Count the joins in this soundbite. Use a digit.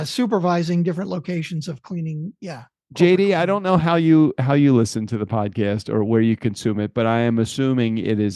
0